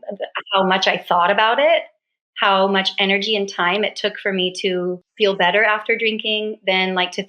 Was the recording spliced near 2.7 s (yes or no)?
no